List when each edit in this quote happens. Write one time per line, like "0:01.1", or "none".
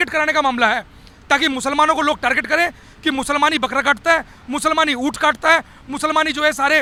none